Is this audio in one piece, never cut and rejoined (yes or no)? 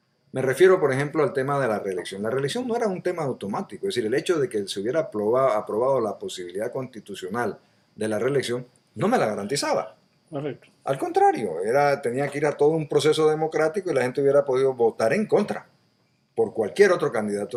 yes